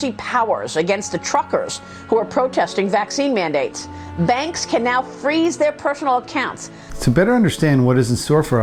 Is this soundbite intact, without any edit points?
yes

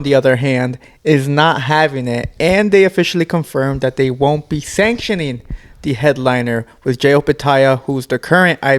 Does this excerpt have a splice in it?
no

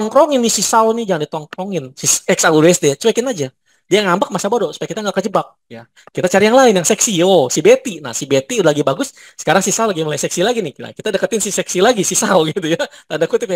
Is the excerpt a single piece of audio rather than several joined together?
yes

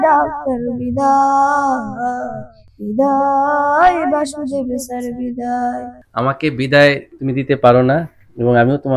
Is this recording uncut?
no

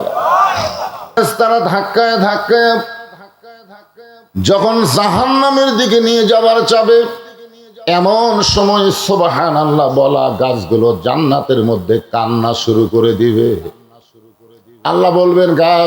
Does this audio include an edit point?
yes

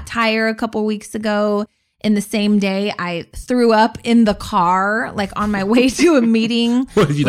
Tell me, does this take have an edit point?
no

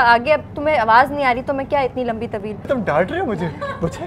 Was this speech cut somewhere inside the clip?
yes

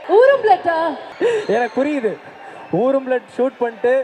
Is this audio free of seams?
no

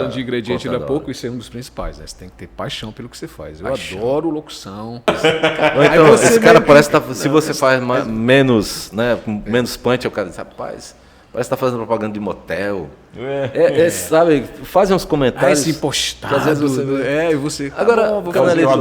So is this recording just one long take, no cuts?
no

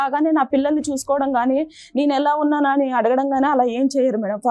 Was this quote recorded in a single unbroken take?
yes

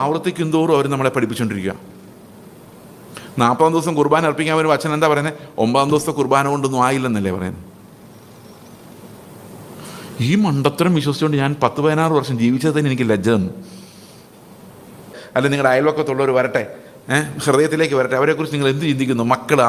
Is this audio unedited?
no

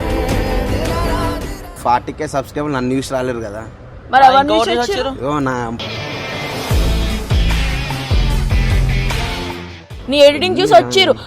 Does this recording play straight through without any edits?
no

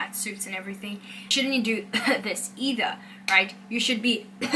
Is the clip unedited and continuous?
no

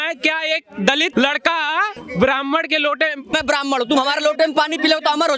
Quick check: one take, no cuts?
no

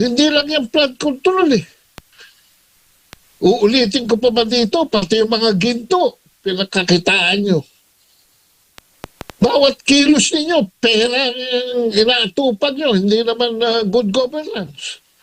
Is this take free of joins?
yes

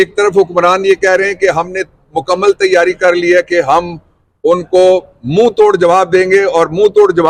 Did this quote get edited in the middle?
no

